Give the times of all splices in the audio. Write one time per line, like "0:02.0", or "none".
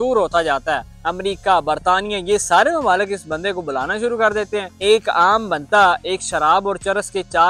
0:01.0
0:04.7